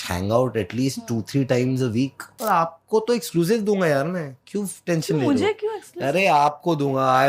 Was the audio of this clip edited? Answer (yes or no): yes